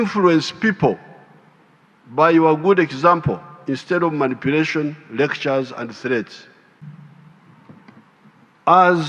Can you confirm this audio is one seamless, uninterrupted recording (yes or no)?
no